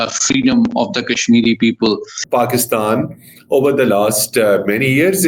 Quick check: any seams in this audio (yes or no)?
yes